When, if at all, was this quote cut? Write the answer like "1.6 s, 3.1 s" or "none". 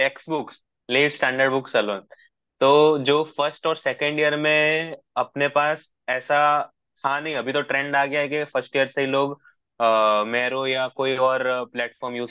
none

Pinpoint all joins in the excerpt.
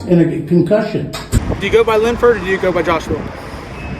1.4 s

